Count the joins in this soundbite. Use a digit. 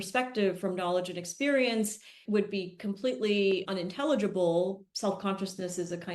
2